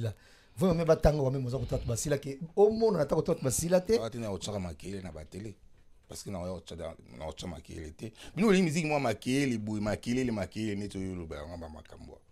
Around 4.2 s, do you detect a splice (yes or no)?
yes